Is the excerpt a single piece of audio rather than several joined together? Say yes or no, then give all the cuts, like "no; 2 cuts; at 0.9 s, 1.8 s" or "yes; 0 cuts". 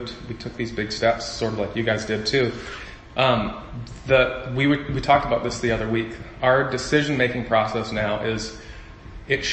yes; 0 cuts